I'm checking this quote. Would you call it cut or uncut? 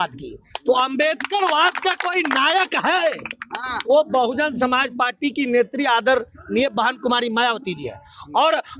uncut